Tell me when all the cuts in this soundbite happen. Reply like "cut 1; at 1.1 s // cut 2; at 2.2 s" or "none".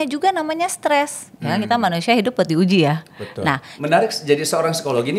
cut 1; at 3.7 s